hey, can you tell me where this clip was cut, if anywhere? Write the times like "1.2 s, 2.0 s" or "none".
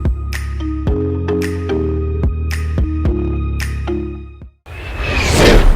4.6 s